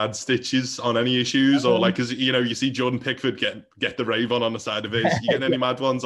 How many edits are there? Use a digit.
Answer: 0